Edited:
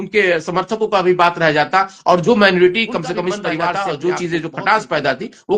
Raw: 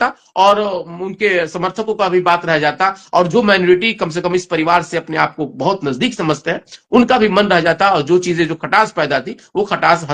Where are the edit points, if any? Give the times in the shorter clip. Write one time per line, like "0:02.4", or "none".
0:03.7